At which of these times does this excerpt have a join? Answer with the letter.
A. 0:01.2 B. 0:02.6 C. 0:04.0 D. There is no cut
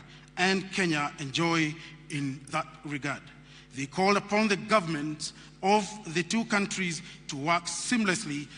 B